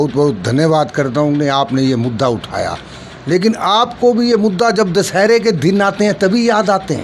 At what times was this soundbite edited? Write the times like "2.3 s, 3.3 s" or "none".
none